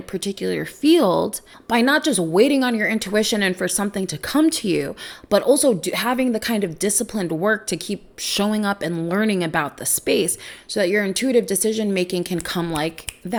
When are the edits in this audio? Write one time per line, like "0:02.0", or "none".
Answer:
none